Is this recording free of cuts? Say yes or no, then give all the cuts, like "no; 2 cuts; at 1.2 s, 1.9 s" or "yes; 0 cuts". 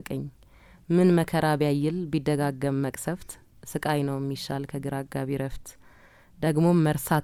yes; 0 cuts